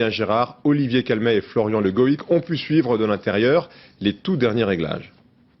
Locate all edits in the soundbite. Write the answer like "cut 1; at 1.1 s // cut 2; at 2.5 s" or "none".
cut 1; at 1.7 s